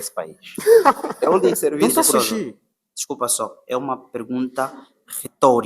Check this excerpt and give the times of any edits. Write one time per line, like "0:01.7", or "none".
0:01.8